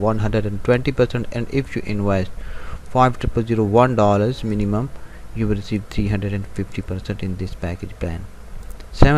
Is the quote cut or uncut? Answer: uncut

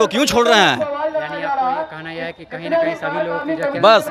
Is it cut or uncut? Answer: uncut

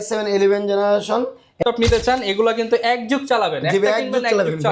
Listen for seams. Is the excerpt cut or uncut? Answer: cut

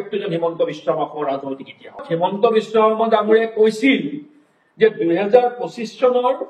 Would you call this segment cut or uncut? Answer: cut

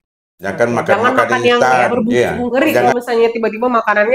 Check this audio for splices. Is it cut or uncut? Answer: cut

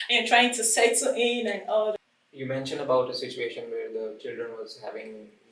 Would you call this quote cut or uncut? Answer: cut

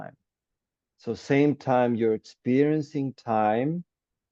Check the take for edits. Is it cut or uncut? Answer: uncut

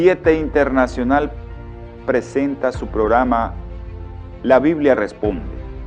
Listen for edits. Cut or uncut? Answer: cut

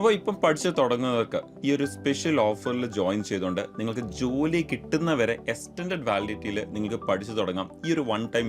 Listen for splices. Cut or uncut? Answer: uncut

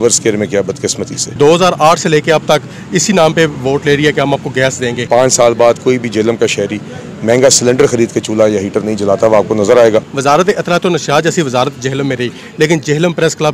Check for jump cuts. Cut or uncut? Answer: cut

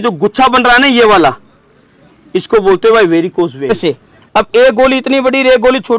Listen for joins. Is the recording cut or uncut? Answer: cut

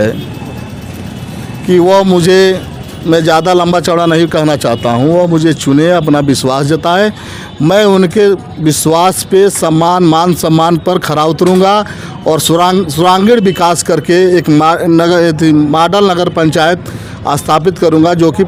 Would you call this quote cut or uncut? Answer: uncut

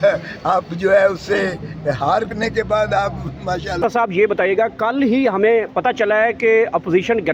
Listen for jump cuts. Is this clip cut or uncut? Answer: cut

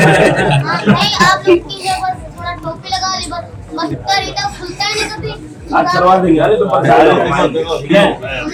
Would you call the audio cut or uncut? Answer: uncut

